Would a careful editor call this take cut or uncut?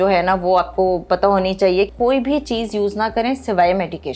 cut